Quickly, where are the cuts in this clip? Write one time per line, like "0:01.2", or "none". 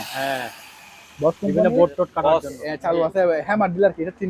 0:02.1